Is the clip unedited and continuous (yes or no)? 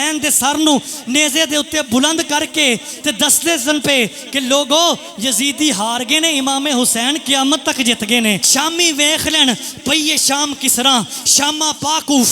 no